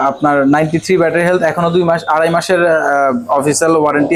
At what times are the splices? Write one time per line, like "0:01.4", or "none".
none